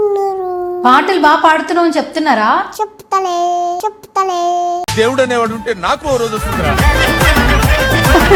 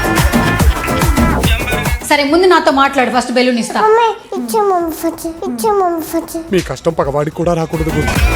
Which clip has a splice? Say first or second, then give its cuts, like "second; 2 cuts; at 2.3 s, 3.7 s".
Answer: second; 1 cut; at 1.9 s